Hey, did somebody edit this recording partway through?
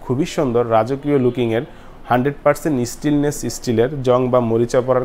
no; 0 cuts

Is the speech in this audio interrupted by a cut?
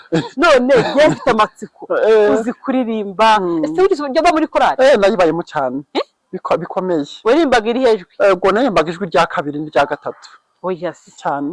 no; 0 cuts

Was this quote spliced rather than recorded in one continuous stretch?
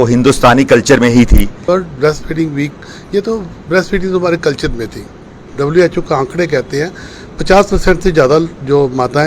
yes; 2 cuts; at 1.5 s, 5.4 s

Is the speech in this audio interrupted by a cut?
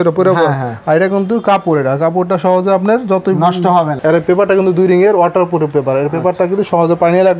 yes; 1 cut; at 3.9 s

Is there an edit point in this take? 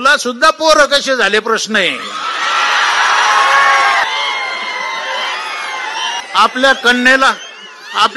yes; 2 cuts; at 4.0 s, 6.2 s

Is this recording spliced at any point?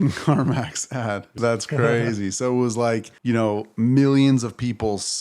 yes; 2 cuts; at 1.3 s, 3.1 s

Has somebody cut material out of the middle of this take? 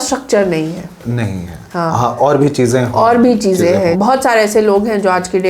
yes; 1 cut; at 4.0 s

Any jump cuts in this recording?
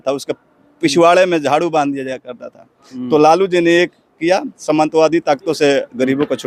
no; 0 cuts

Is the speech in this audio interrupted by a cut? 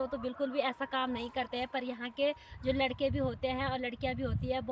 no; 0 cuts

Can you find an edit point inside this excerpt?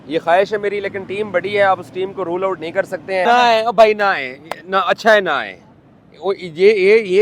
yes; 1 cut; at 3.2 s

